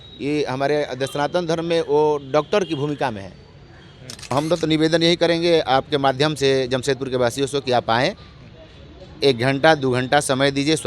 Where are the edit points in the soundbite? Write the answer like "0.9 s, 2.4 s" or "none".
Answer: 4.3 s